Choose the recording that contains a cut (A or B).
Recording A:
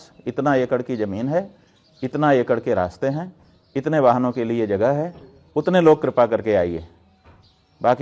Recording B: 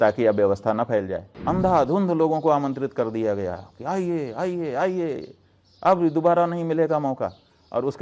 B